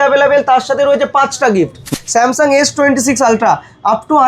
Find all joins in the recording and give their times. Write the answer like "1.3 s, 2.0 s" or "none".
1.9 s